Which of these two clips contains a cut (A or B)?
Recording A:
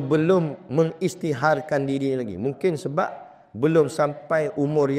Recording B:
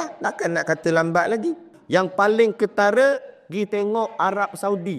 B